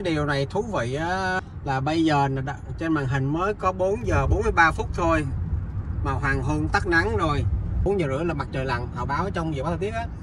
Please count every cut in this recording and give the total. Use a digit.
2